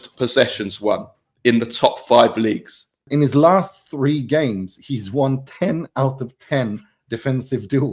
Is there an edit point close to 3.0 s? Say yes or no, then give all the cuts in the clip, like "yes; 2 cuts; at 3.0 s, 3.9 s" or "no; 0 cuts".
yes; 1 cut; at 3.0 s